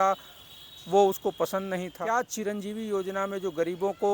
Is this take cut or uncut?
cut